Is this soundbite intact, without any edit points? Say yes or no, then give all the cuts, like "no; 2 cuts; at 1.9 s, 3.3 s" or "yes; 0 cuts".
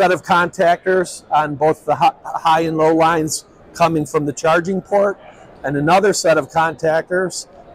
yes; 0 cuts